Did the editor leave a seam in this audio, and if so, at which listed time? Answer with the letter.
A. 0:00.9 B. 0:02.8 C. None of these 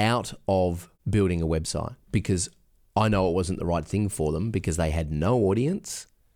A